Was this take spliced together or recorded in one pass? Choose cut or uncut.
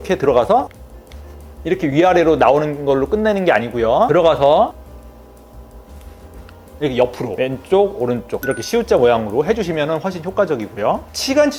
uncut